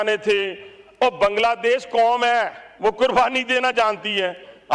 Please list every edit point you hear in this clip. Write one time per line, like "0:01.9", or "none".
0:02.6